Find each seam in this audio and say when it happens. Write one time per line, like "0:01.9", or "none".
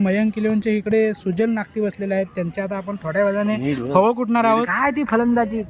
0:04.7